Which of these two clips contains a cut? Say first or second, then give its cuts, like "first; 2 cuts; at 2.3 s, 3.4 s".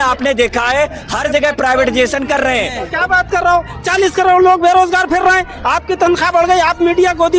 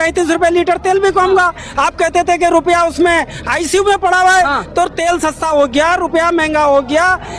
first; 1 cut; at 2.8 s